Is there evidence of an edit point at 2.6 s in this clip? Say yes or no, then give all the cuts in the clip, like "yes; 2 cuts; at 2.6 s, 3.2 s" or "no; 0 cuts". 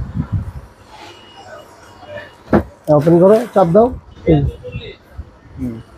no; 1 cut; at 4.1 s